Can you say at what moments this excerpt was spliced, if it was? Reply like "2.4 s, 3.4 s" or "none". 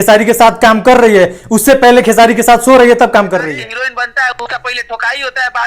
3.5 s

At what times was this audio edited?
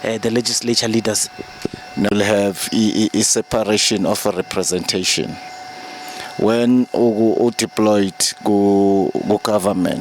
2.1 s

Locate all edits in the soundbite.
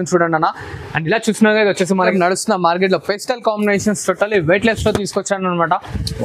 2.0 s

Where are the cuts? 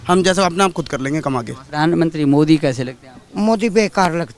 1.6 s

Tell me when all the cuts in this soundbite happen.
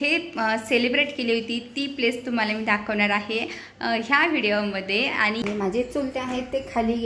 5.4 s

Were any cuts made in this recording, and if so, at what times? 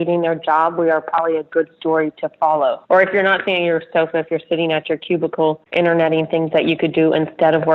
2.8 s, 5.6 s

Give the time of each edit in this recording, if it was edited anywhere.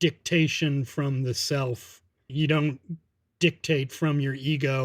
2.3 s

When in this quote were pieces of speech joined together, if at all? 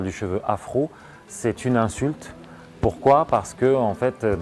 none

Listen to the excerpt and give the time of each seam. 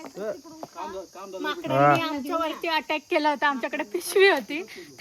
none

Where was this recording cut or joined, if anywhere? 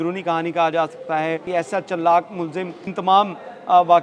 1.4 s

